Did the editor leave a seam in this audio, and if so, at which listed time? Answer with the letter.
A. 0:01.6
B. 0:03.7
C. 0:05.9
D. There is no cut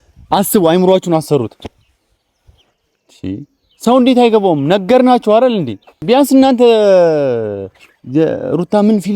C